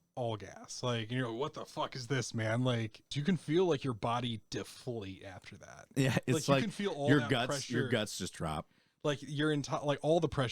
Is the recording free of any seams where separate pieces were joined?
no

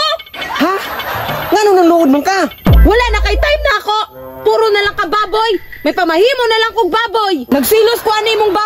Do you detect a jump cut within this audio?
yes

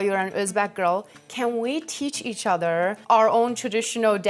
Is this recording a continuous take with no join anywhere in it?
yes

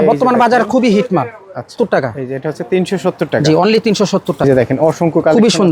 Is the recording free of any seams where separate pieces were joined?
no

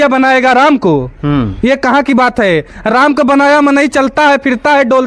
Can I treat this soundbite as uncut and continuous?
yes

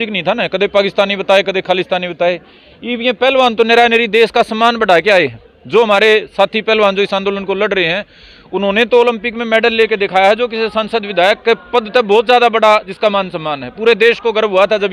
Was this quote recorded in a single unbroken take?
yes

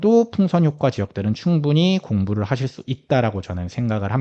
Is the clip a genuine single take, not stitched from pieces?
yes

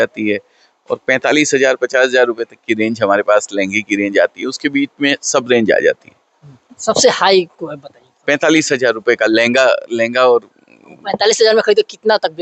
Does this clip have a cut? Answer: no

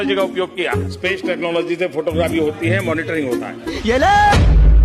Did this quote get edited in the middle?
yes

